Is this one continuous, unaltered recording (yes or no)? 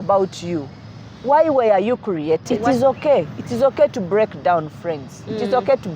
no